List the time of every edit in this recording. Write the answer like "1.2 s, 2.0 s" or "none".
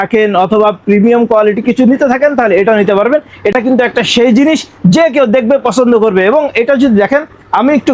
none